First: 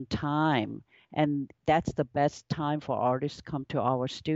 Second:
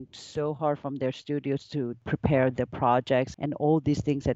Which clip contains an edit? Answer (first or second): second